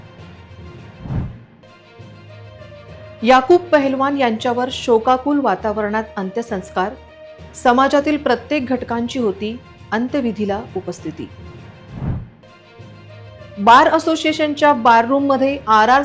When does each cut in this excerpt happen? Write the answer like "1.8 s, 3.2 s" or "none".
0.9 s

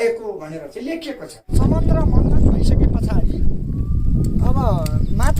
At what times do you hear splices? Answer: 1.5 s

